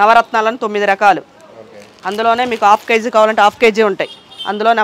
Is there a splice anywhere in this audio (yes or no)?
no